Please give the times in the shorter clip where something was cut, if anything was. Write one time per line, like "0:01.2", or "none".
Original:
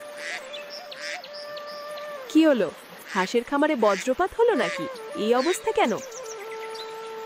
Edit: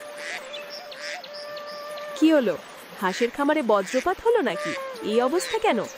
0:02.2